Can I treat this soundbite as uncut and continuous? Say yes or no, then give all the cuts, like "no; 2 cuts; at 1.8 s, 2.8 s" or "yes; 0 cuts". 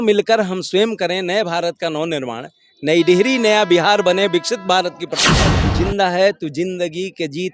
no; 1 cut; at 5.5 s